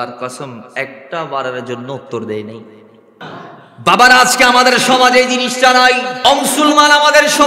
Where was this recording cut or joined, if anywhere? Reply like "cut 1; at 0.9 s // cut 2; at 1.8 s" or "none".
cut 1; at 3.2 s // cut 2; at 6.2 s